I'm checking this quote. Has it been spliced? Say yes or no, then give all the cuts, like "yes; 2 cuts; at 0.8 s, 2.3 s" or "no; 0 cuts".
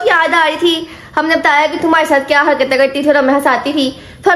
no; 0 cuts